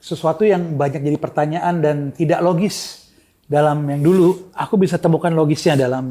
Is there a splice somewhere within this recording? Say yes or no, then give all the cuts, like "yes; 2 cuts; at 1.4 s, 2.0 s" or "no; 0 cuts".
no; 0 cuts